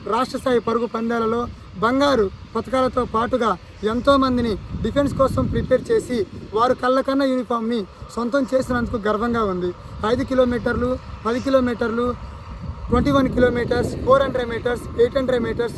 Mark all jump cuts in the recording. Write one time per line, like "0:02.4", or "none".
none